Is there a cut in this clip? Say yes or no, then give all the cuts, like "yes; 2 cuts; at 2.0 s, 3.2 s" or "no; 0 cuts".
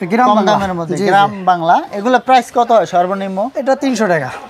no; 0 cuts